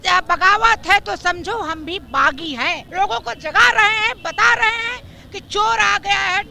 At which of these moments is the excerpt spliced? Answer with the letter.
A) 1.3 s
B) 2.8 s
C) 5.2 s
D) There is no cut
B